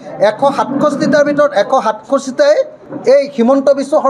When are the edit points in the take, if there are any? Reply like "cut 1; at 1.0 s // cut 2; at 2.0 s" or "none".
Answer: cut 1; at 2.8 s